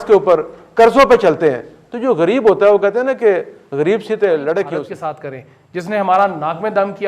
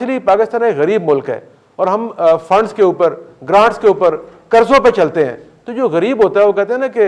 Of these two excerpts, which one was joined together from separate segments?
first; 1 cut; at 4.9 s

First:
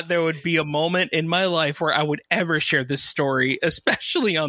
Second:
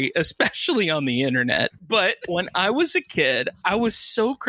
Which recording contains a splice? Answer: second; 2 cuts; at 2.3 s, 3.5 s

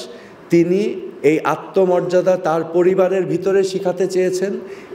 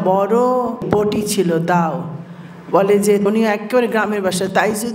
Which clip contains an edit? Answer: second; 2 cuts; at 0.8 s, 3.2 s

